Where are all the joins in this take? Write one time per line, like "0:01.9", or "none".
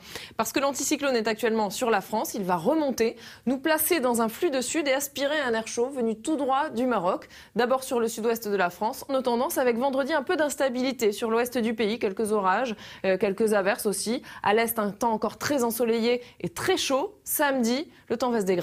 none